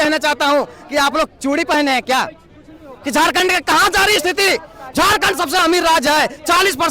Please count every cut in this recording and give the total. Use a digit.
0